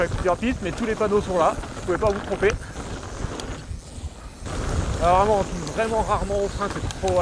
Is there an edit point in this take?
yes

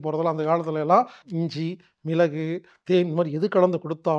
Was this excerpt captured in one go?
no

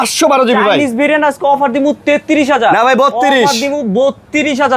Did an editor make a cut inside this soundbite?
no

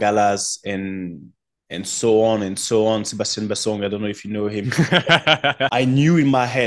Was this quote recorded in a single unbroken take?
no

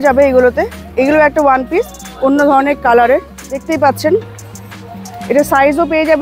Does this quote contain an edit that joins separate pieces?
yes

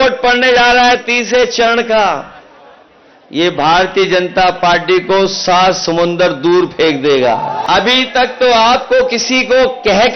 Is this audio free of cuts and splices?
no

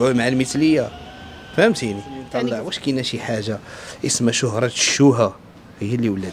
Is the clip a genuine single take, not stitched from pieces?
no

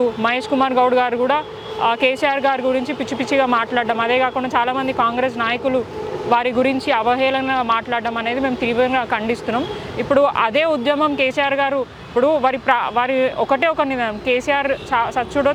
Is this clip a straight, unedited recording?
yes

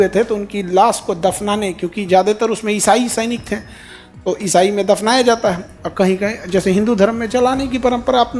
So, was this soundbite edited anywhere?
no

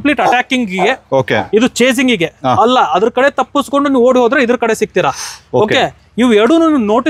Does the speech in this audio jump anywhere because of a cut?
no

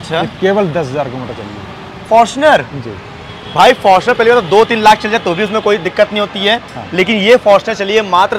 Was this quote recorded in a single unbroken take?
yes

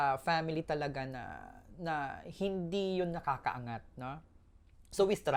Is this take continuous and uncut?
yes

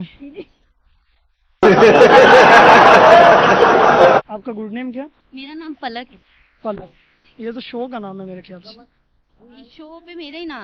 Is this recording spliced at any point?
no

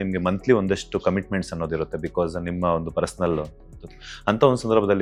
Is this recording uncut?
yes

